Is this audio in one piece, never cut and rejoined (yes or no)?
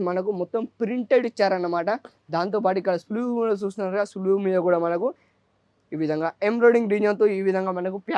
yes